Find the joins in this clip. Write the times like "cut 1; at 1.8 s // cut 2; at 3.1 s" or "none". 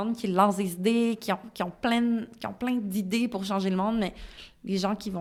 none